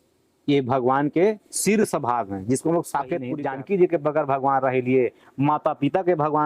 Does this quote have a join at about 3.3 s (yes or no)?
yes